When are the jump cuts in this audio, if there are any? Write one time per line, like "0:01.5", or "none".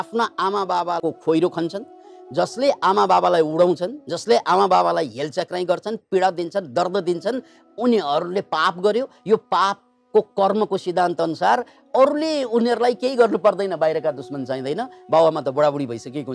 0:01.0